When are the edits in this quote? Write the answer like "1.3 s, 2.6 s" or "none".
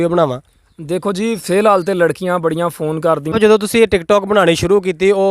3.3 s